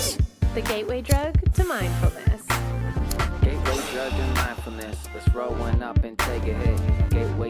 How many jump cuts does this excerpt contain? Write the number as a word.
one